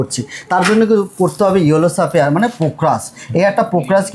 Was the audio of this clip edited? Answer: no; 0 cuts

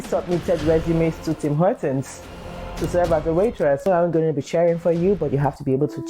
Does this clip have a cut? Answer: yes; 1 cut; at 3.9 s

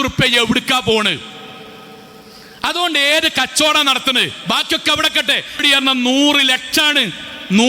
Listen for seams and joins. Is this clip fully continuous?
no; 1 cut; at 5.6 s

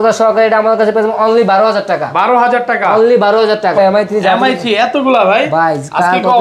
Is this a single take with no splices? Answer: no; 1 cut; at 3.8 s

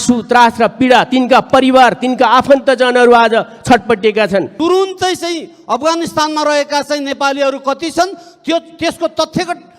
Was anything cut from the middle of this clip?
yes; 1 cut; at 4.5 s

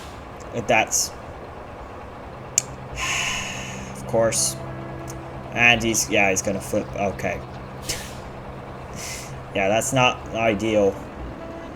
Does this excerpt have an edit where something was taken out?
no; 0 cuts

